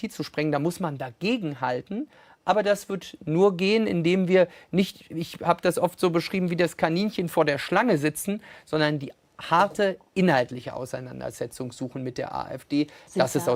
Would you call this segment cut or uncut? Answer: uncut